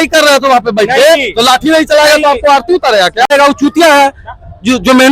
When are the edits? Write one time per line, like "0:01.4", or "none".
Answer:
0:03.3